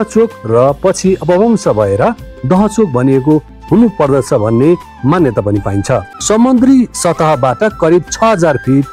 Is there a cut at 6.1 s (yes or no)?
yes